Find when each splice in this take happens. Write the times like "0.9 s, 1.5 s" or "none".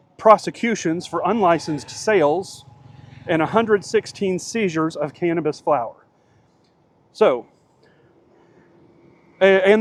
none